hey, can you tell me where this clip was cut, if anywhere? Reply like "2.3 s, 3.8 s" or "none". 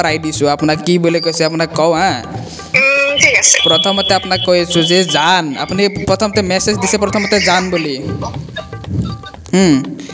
none